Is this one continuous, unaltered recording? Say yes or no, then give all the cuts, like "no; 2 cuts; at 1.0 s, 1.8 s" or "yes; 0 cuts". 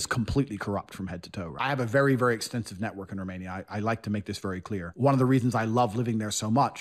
no; 2 cuts; at 1.5 s, 4.9 s